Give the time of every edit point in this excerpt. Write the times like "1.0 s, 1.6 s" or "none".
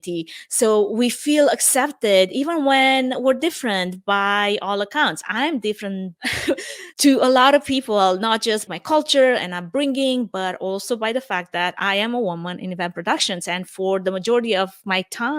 none